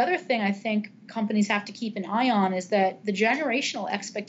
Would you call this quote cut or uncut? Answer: uncut